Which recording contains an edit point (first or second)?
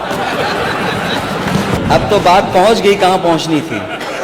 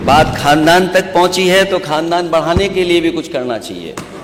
first